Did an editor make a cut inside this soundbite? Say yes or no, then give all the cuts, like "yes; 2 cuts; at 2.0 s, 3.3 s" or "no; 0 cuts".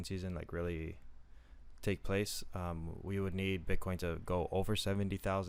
no; 0 cuts